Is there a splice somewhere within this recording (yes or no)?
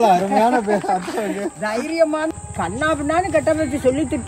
yes